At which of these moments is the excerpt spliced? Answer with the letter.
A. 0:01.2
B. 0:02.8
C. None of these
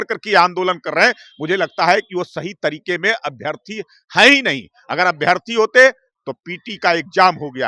C